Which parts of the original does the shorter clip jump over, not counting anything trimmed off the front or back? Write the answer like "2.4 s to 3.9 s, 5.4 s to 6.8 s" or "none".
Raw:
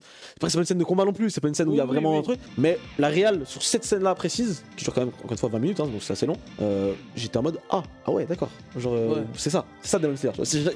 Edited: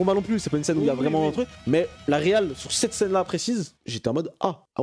4.7 s to 7.1 s